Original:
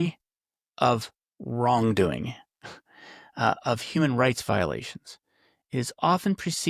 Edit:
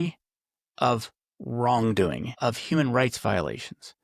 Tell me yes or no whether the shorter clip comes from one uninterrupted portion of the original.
no